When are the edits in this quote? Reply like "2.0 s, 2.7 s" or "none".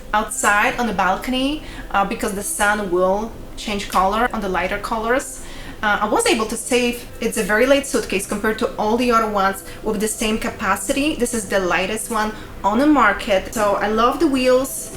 7.0 s, 13.5 s